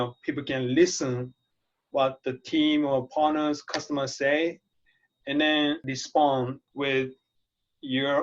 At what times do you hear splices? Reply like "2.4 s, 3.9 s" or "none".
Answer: 5.8 s, 6.6 s

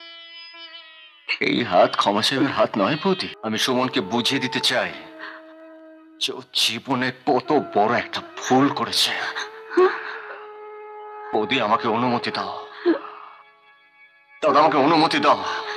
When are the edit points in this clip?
3.3 s

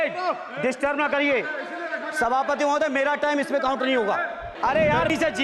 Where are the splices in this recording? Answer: 4.5 s

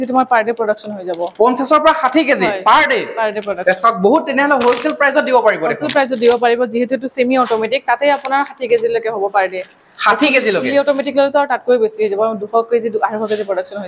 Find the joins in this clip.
none

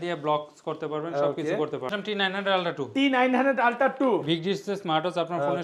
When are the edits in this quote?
1.9 s

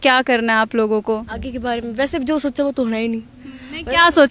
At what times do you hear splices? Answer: none

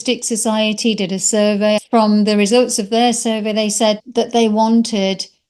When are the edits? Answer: 1.8 s, 4.0 s

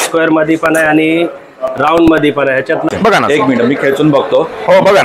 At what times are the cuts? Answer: 2.9 s

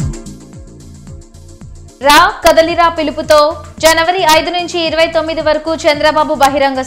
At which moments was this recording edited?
1.1 s

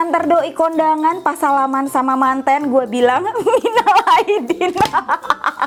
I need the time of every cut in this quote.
none

